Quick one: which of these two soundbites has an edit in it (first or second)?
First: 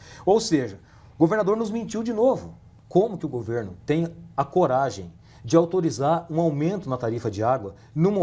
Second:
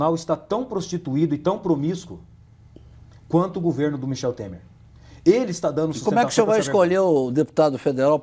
first